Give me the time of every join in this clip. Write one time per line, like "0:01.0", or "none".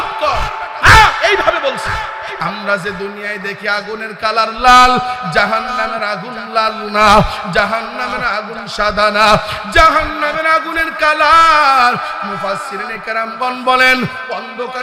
0:02.4